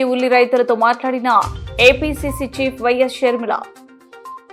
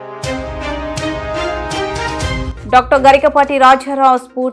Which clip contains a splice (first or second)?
second